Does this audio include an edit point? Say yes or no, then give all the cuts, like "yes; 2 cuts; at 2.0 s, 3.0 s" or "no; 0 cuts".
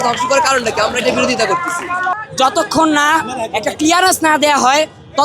yes; 1 cut; at 2.1 s